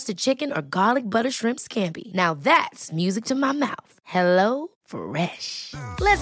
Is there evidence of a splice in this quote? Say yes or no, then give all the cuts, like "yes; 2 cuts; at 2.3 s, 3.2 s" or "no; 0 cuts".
no; 0 cuts